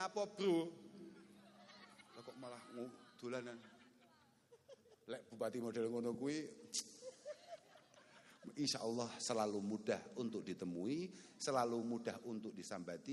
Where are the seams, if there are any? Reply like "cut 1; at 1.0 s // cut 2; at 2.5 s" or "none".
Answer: none